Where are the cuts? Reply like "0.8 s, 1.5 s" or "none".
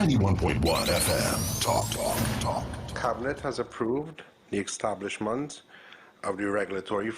2.7 s